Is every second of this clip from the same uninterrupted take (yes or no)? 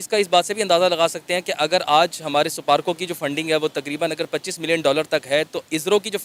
yes